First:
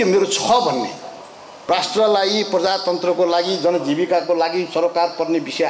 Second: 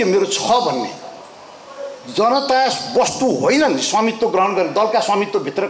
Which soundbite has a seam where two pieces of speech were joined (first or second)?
first